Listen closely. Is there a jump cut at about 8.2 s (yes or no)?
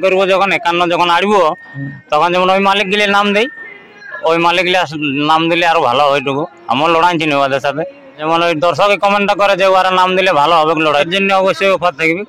yes